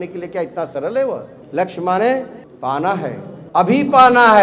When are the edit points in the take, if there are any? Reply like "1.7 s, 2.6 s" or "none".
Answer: 1.4 s, 2.9 s